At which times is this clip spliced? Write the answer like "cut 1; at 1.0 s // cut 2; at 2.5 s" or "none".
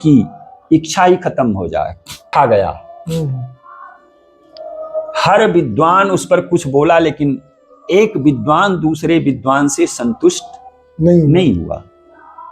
cut 1; at 2.2 s